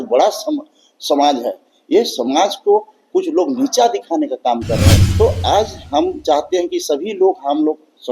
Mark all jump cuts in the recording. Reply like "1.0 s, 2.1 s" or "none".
5.0 s